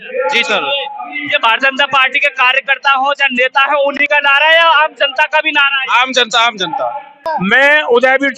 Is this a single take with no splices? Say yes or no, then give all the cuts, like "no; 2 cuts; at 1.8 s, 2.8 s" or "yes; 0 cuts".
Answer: no; 1 cut; at 7.3 s